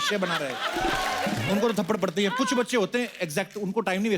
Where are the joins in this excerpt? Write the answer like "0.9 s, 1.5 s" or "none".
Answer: 1.3 s

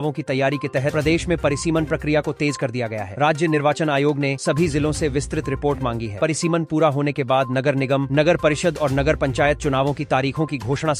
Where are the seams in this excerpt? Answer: none

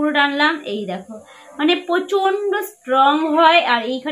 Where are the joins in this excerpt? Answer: none

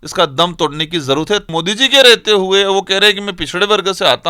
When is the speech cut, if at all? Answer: 1.4 s

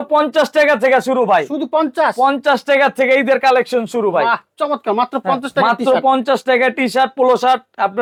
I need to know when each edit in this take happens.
none

